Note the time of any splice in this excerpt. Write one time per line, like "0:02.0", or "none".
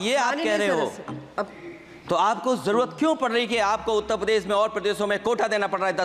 none